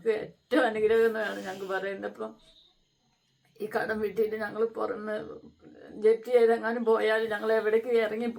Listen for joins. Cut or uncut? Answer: uncut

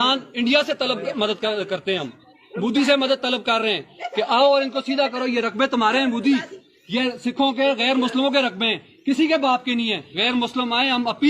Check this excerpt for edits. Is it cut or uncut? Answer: cut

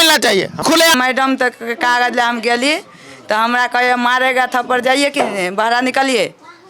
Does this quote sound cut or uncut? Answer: cut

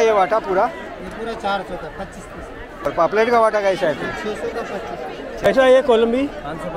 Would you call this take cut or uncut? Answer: cut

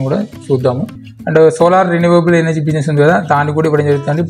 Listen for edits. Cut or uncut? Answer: cut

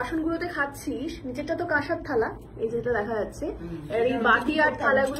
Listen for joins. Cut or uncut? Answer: uncut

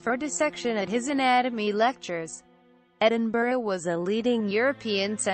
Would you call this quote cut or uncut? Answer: cut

